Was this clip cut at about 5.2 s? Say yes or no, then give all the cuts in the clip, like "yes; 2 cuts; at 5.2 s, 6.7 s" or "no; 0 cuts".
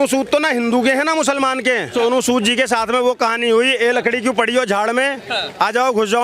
no; 1 cut; at 1.9 s